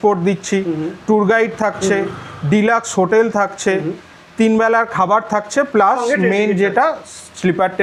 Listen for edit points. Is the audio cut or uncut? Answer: uncut